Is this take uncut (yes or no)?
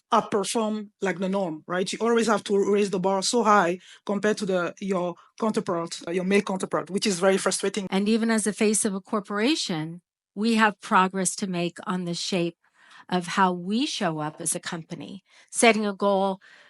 no